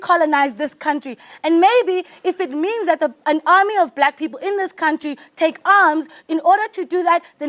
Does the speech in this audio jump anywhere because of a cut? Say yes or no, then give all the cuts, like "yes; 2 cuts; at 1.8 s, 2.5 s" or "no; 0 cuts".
no; 0 cuts